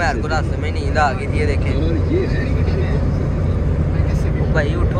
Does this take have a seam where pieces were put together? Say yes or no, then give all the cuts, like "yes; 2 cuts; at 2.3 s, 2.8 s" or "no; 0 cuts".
no; 0 cuts